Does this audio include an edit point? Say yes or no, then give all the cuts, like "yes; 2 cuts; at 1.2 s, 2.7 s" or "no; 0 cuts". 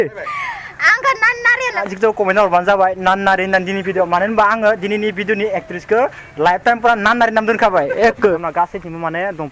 yes; 2 cuts; at 1.9 s, 8.4 s